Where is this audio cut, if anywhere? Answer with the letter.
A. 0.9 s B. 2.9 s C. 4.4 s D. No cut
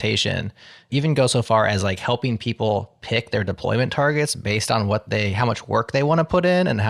D